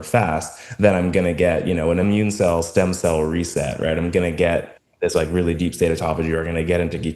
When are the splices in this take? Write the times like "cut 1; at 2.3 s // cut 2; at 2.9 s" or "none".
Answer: cut 1; at 2.0 s